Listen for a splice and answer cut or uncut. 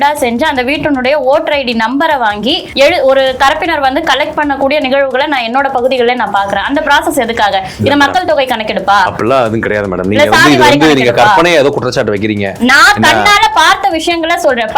cut